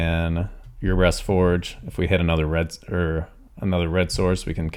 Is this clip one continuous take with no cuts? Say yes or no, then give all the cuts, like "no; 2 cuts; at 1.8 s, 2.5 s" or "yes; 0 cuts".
yes; 0 cuts